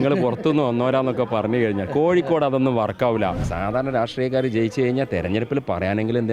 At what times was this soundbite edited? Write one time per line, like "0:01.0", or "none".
0:03.5